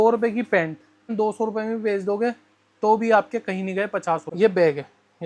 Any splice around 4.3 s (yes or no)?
yes